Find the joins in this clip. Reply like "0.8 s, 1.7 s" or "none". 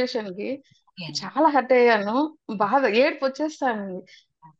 none